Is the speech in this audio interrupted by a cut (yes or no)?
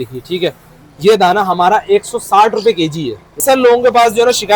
yes